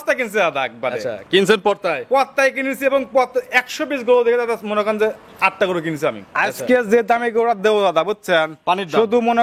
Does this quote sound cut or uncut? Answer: cut